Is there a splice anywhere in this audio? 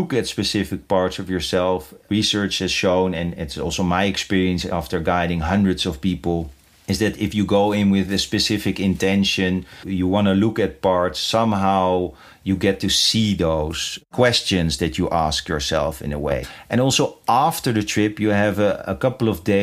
yes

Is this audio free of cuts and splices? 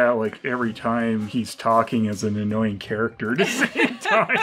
yes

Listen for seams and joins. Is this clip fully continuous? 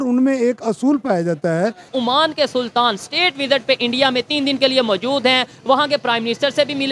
no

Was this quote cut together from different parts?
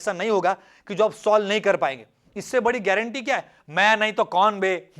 yes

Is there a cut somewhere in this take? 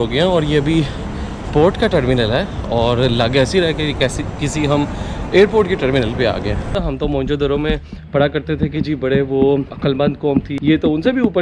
yes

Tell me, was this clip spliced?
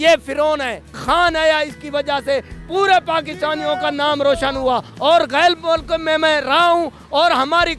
yes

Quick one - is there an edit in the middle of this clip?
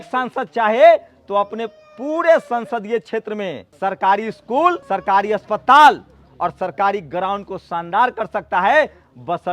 yes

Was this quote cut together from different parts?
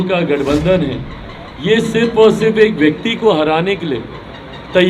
no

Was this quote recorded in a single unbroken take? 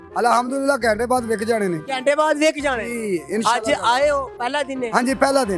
yes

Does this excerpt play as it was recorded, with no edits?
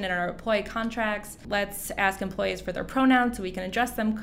no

